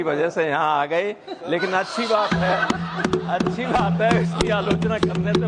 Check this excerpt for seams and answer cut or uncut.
uncut